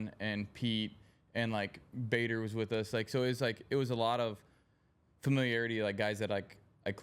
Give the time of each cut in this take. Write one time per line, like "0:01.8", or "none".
none